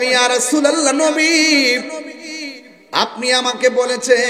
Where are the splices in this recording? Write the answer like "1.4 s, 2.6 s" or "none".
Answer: none